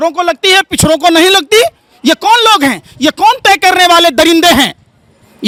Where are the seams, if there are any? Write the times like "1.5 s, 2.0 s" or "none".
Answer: none